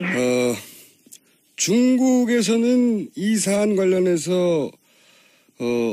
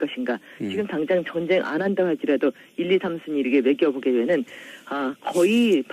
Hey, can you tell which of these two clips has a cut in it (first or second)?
second